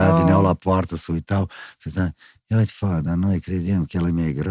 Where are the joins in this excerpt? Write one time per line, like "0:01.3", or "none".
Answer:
none